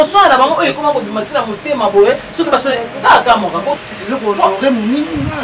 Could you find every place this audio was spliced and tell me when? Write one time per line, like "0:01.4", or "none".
0:03.8